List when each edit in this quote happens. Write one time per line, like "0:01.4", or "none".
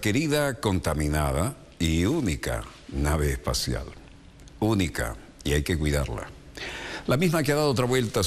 none